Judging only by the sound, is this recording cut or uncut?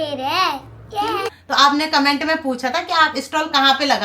cut